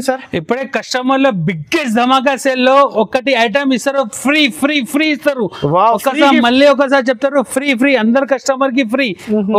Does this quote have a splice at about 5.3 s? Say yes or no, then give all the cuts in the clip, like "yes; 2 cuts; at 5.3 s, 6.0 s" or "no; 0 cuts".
no; 0 cuts